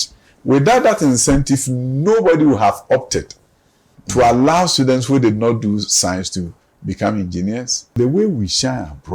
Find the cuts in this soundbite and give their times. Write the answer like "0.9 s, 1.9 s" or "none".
8.0 s